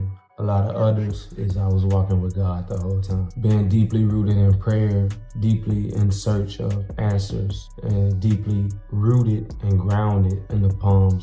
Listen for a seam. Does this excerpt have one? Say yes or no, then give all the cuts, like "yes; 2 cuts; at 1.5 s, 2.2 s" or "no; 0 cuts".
no; 0 cuts